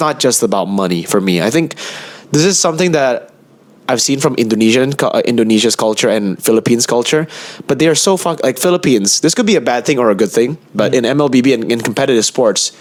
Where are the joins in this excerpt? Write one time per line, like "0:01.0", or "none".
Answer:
none